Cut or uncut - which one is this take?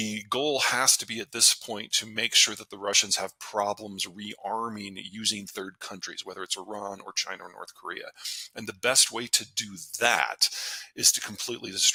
uncut